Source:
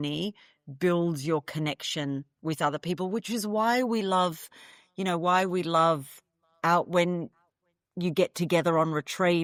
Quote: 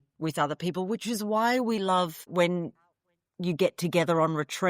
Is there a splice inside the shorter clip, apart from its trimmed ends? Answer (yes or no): yes